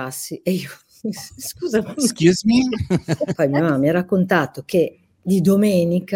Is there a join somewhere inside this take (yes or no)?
yes